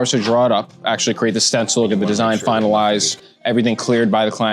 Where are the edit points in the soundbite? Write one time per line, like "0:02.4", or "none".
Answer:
none